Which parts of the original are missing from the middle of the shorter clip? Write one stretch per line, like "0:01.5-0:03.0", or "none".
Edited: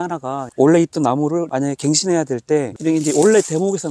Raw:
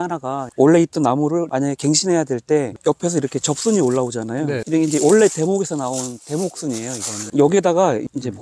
0:02.8-0:04.6